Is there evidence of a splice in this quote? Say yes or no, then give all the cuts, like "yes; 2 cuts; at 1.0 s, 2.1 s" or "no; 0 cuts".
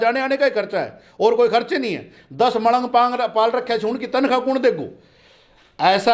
no; 0 cuts